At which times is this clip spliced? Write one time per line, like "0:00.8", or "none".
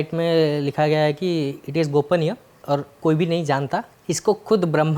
0:02.6
0:03.9